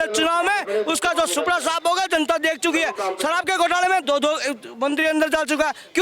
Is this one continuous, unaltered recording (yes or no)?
yes